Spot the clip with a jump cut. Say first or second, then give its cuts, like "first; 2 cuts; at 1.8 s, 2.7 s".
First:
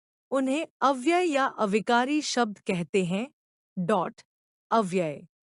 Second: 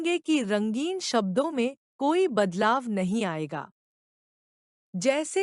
second; 1 cut; at 2.5 s